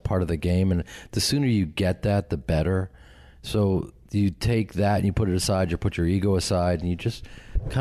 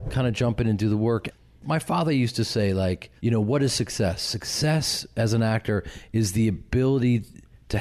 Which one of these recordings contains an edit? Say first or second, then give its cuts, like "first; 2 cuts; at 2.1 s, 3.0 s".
second; 2 cuts; at 1.3 s, 3.1 s